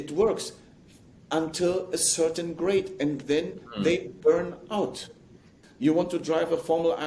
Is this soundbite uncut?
no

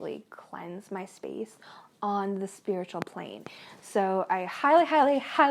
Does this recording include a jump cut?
yes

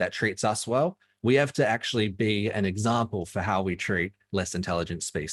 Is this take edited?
no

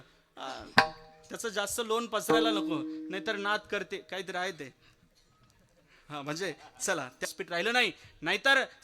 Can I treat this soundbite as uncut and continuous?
no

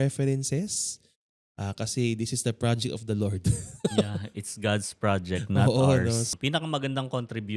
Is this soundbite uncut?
no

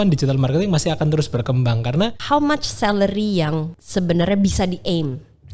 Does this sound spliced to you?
yes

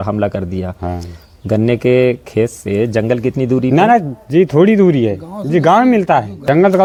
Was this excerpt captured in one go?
yes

